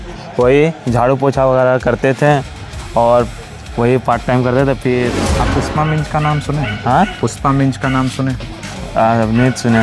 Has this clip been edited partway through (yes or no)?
yes